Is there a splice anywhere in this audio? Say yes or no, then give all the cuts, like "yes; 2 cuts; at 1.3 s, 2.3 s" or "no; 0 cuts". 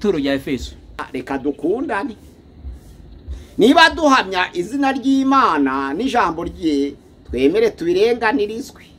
yes; 1 cut; at 1.0 s